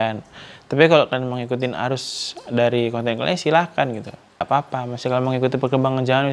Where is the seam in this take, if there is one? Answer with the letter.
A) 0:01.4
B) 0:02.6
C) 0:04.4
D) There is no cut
C